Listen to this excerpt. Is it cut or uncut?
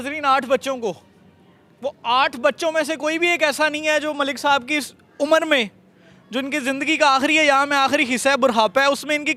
uncut